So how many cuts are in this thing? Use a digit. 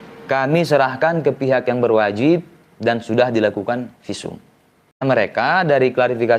1